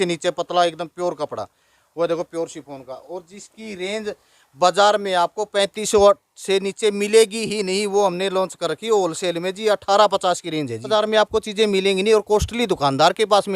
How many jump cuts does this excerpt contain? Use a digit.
1